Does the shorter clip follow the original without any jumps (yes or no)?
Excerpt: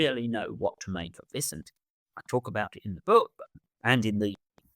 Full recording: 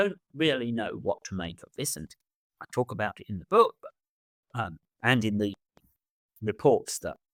no